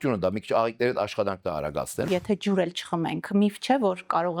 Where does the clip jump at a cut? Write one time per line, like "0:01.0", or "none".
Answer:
0:02.1